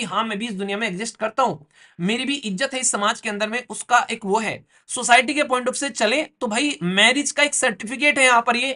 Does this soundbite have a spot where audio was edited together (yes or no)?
no